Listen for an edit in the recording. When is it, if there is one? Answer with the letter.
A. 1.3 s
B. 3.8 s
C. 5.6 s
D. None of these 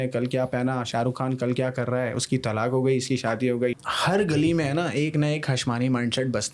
B